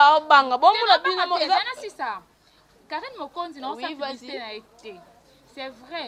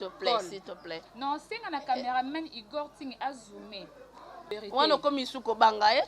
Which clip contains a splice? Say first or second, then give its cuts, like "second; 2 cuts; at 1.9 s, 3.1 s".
second; 1 cut; at 4.5 s